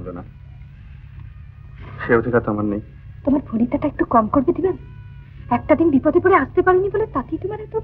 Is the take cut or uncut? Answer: uncut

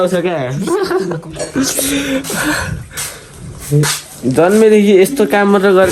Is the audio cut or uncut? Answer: uncut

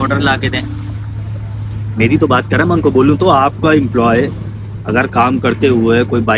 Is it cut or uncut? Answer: uncut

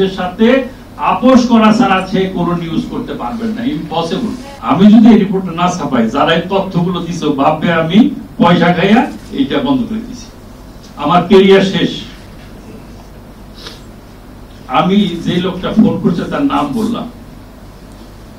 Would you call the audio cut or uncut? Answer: cut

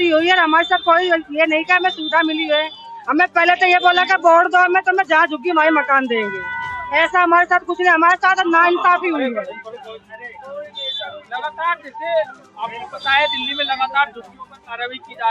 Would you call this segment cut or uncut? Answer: uncut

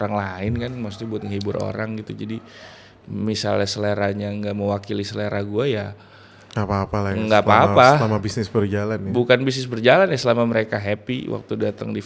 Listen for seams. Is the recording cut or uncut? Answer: uncut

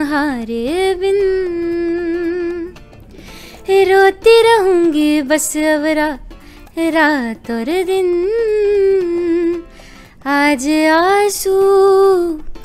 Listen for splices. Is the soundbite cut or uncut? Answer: uncut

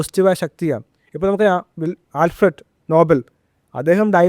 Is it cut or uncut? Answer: uncut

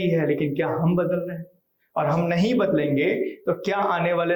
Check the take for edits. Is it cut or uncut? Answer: uncut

